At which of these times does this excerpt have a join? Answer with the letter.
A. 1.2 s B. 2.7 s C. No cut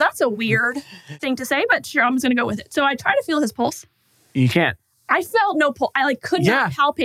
A